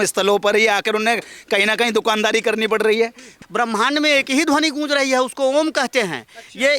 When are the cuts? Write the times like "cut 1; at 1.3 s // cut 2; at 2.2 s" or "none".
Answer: cut 1; at 3.3 s

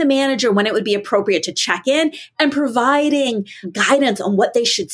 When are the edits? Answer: cut 1; at 3.6 s

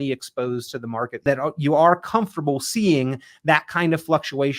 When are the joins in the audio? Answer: cut 1; at 1.2 s

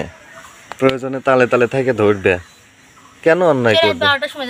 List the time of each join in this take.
none

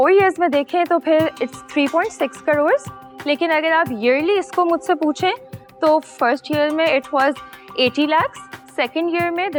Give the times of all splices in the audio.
none

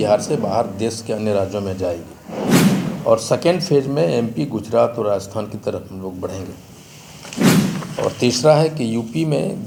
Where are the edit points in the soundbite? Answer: none

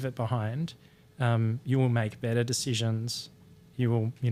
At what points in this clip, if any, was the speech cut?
none

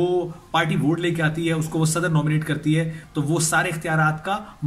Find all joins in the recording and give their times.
cut 1; at 3.0 s

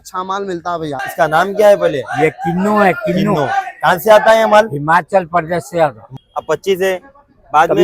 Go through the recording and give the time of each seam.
cut 1; at 1.0 s // cut 2; at 6.0 s

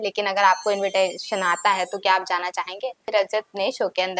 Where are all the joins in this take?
cut 1; at 3.1 s

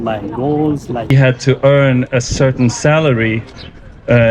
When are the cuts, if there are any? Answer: cut 1; at 1.1 s

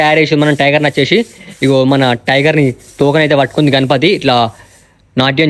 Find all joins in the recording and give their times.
none

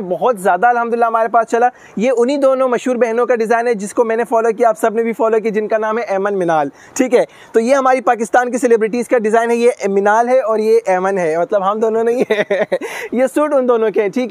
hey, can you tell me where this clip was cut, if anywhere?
none

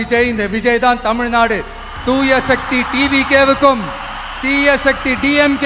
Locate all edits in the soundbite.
none

